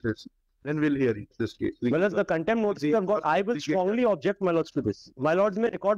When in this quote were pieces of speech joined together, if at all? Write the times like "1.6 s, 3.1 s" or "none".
none